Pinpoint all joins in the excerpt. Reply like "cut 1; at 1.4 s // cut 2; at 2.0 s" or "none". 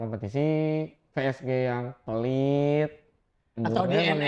none